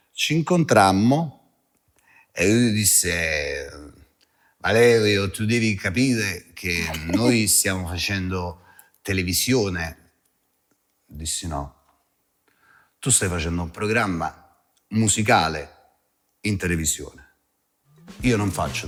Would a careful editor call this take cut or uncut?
uncut